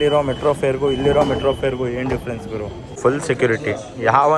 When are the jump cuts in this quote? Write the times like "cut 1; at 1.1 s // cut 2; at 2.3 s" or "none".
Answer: cut 1; at 3.0 s